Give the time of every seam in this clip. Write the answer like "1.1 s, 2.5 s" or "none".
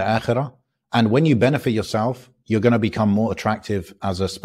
none